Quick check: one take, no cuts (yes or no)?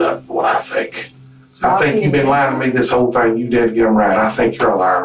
yes